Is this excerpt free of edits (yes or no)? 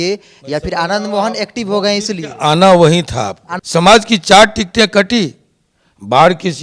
no